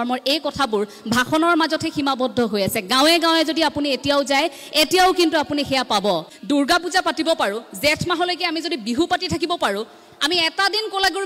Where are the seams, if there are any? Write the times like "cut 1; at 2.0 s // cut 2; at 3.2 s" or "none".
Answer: cut 1; at 6.3 s